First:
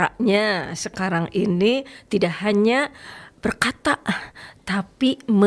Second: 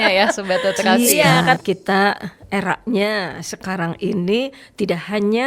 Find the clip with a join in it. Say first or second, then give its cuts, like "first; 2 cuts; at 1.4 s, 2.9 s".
second; 1 cut; at 1.6 s